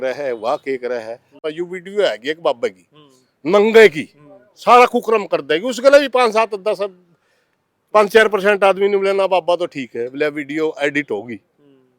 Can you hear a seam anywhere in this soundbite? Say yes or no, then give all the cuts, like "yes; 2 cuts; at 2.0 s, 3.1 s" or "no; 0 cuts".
yes; 1 cut; at 1.4 s